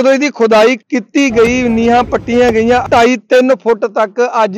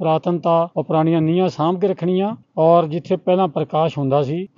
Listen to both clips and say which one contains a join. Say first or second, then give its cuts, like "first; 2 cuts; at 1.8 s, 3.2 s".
first; 2 cuts; at 0.9 s, 2.9 s